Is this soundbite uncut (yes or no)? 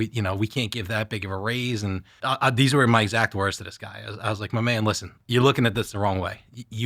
no